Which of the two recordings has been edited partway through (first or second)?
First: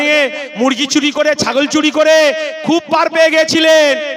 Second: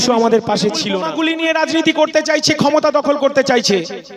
second